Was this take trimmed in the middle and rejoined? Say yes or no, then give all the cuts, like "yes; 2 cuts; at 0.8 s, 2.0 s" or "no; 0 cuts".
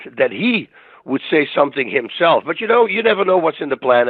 yes; 1 cut; at 2.9 s